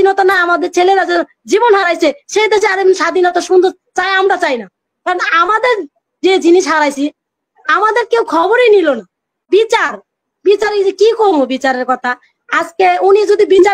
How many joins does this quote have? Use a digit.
1